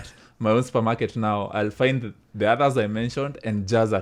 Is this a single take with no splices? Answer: yes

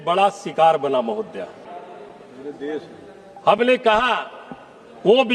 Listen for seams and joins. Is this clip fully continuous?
no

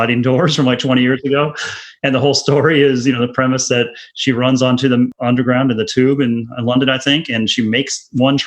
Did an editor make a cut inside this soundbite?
yes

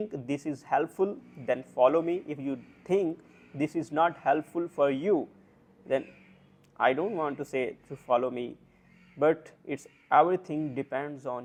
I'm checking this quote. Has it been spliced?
no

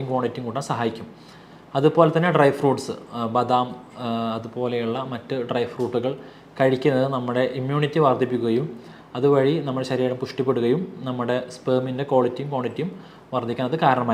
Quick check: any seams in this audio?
no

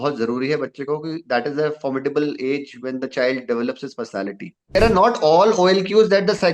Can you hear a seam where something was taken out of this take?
yes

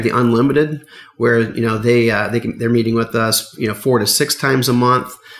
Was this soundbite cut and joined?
no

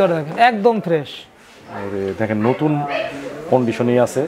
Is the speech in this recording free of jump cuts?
yes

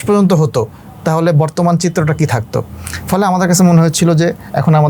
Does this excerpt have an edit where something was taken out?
no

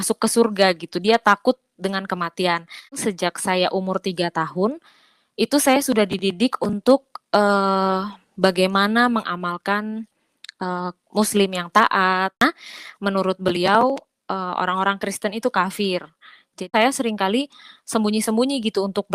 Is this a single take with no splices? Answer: no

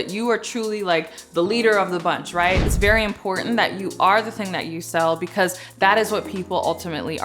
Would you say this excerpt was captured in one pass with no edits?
no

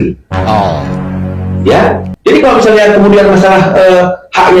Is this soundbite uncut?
no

